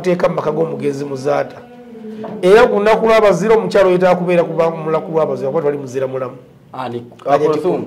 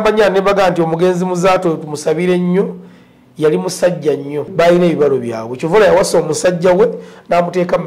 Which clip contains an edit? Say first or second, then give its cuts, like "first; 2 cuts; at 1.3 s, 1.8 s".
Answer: second; 1 cut; at 4.5 s